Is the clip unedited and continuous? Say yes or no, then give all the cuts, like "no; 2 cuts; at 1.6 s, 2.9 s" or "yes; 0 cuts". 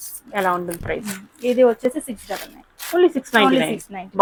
yes; 0 cuts